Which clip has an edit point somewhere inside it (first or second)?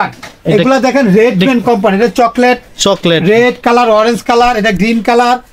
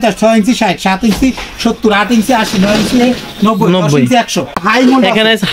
second